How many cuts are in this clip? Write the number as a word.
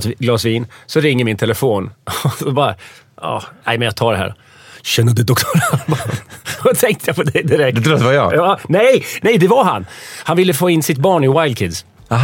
zero